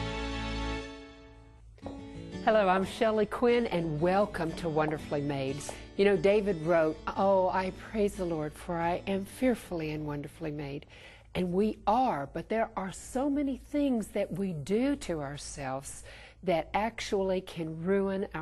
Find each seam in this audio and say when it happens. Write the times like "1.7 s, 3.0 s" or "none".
14.6 s